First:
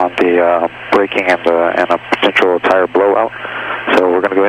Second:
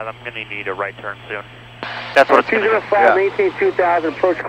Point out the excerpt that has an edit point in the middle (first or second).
second